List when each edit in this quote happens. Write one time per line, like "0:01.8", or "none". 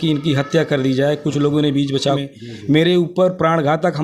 0:02.2